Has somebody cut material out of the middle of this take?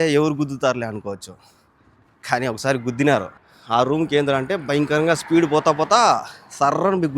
yes; 1 cut; at 3.4 s

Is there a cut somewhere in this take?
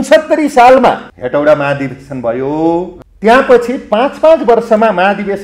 yes; 2 cuts; at 1.1 s, 3.0 s

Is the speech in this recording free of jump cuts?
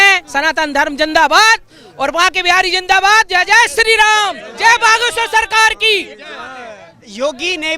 yes; 0 cuts

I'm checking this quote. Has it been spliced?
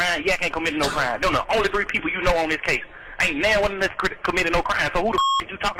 no; 0 cuts

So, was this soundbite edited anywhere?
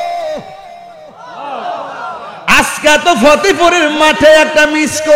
no; 0 cuts

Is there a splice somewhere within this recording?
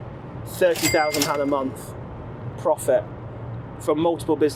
no; 0 cuts

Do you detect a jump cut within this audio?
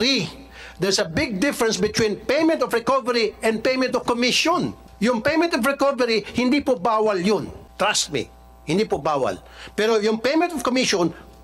yes; 2 cuts; at 4.8 s, 7.6 s

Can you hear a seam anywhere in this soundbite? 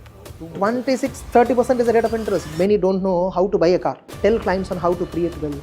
yes; 2 cuts; at 2.5 s, 4.1 s

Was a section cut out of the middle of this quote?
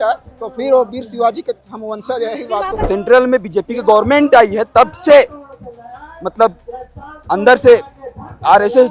yes; 1 cut; at 2.7 s

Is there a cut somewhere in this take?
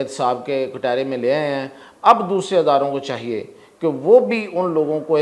no; 0 cuts

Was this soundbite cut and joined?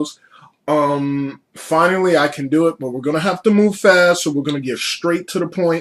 no; 0 cuts

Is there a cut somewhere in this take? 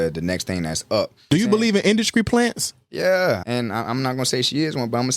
yes; 2 cuts; at 1.2 s, 3.4 s

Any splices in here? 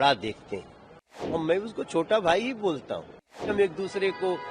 yes; 2 cuts; at 1.4 s, 3.5 s

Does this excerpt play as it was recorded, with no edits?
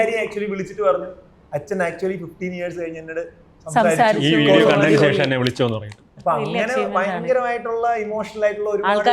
yes; 0 cuts

